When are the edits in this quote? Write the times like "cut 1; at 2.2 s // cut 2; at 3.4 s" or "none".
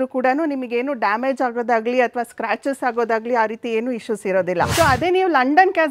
cut 1; at 4.7 s